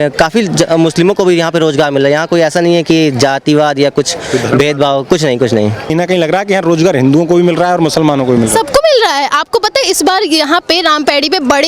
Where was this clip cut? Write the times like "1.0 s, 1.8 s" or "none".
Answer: 5.9 s